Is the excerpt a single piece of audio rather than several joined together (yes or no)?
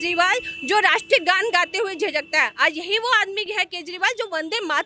yes